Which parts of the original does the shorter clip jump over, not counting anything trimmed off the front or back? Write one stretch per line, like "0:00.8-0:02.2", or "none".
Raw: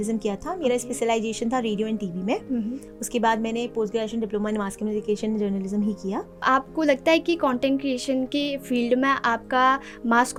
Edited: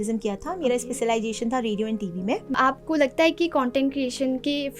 0:02.5-0:06.3